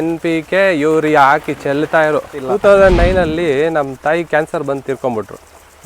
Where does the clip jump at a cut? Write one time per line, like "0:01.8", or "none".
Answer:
0:02.4